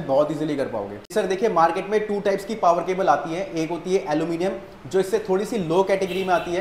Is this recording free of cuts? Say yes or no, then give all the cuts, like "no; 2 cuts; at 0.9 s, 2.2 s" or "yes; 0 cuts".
no; 1 cut; at 1.0 s